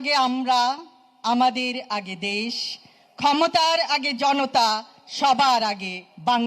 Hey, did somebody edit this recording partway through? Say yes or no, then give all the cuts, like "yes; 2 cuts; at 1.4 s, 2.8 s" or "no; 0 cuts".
no; 0 cuts